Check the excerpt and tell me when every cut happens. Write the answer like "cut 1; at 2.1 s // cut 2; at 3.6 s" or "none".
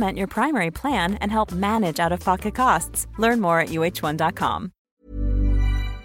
cut 1; at 4.9 s